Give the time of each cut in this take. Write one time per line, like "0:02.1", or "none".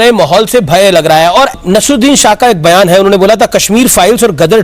0:01.6